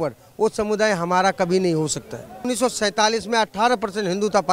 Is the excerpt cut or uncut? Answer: cut